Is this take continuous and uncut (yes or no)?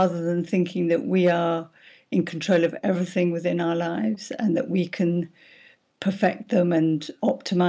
yes